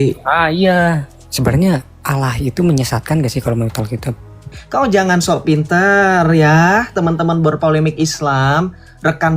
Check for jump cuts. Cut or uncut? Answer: cut